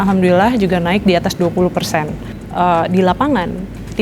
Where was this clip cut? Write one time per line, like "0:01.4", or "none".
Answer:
0:02.4